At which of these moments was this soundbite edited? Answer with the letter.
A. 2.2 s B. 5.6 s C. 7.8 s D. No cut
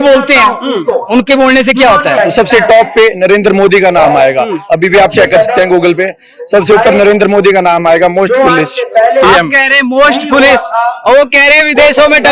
A